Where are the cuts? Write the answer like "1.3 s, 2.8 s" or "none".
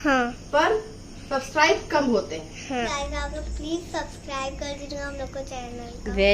2.9 s